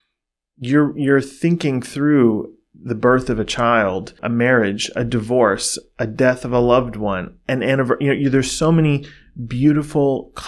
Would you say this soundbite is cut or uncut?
uncut